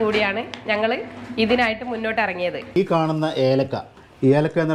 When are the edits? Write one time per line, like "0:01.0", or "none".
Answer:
0:02.8